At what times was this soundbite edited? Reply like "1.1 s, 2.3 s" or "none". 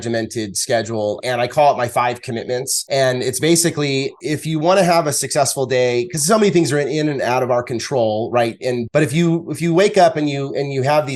1.2 s, 2.7 s, 4.2 s, 8.8 s